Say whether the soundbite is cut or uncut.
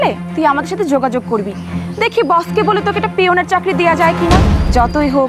uncut